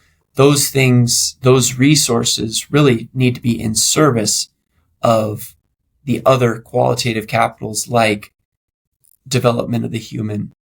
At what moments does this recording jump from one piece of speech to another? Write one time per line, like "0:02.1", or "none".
none